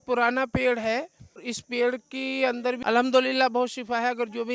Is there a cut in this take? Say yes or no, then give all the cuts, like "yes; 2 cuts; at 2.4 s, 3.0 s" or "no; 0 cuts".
yes; 2 cuts; at 1.6 s, 2.8 s